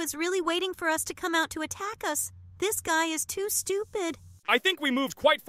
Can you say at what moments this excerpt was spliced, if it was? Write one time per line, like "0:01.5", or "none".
0:04.3

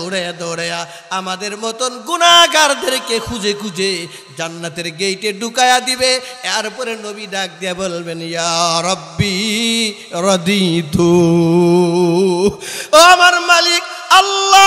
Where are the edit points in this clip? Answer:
none

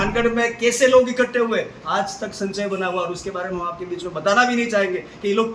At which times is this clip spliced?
none

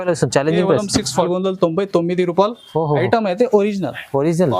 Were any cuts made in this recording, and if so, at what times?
0:01.3

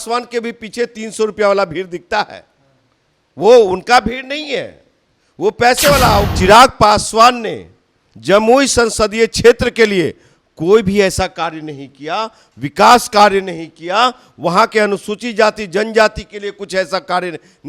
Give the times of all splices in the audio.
0:06.3

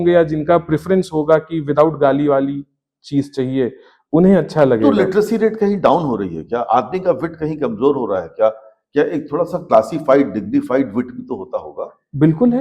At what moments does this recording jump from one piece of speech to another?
none

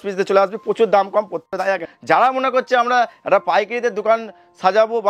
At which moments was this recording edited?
0:01.6

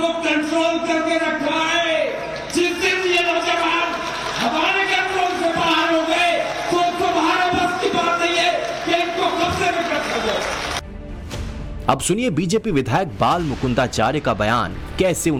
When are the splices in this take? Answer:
none

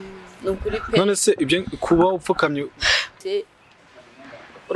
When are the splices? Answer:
0:03.2

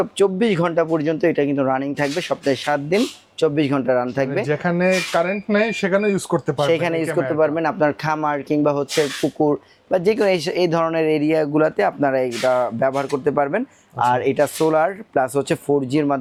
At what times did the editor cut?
none

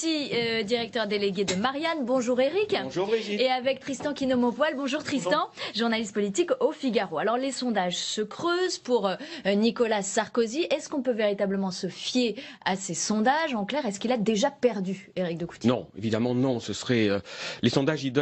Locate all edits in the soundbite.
0:11.5

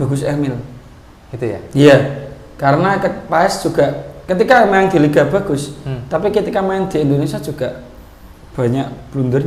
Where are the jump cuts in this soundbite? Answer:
none

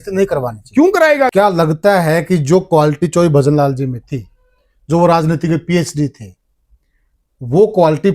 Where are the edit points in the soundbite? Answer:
0:01.3

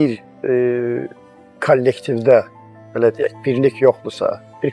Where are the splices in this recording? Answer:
none

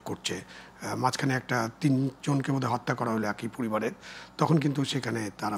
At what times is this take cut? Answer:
none

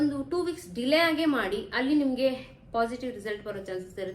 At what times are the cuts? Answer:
none

